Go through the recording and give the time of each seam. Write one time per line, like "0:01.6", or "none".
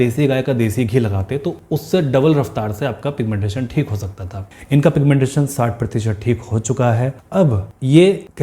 none